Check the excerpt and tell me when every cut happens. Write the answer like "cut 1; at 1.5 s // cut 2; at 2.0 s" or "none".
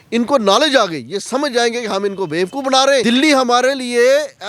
cut 1; at 3.0 s